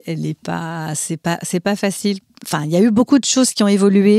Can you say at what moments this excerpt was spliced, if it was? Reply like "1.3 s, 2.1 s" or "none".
2.4 s